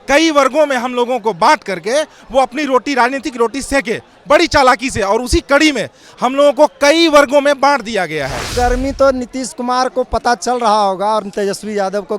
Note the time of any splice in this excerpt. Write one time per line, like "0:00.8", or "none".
0:08.5